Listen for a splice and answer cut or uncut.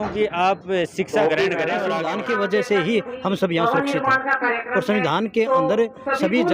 cut